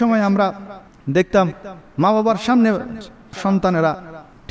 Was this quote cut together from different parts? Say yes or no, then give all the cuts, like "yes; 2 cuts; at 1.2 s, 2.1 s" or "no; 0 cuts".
yes; 1 cut; at 3.4 s